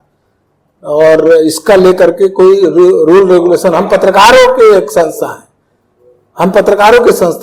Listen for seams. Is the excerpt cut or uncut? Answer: uncut